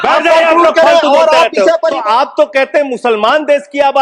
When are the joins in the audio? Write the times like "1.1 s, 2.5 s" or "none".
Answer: 2.0 s